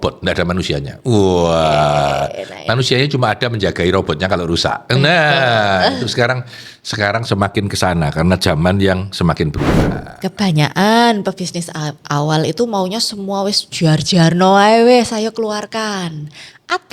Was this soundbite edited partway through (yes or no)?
yes